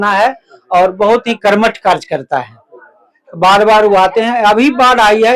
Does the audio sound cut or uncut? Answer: uncut